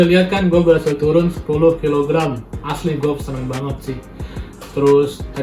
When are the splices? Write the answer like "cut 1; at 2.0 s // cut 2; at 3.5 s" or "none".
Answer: none